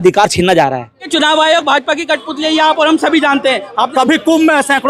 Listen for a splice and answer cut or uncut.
cut